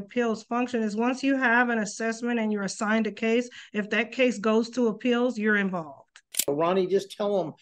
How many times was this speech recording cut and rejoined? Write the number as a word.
one